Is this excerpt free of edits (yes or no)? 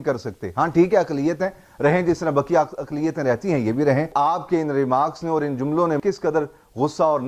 no